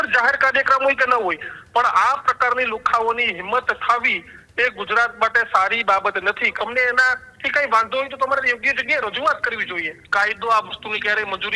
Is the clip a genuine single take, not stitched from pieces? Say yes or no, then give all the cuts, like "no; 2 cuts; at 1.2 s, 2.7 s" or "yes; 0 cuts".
no; 2 cuts; at 6.5 s, 10.0 s